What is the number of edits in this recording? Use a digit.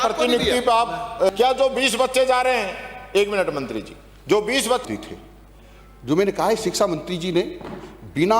2